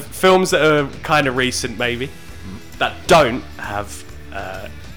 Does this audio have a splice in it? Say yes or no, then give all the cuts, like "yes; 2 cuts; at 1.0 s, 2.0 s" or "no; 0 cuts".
no; 0 cuts